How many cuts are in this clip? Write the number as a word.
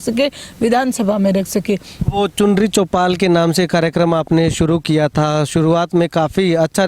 one